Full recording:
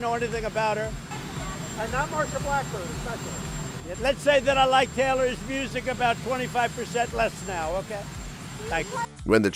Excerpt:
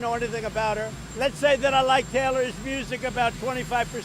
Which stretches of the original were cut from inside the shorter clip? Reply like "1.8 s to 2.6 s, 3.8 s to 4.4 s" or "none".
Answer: 1.0 s to 3.9 s